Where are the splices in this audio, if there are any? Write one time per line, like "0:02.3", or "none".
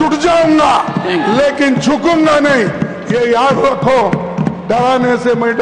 none